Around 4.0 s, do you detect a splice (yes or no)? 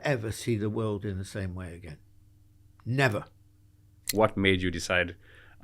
yes